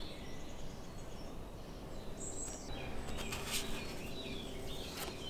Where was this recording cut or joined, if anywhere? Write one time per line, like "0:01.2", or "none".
0:02.7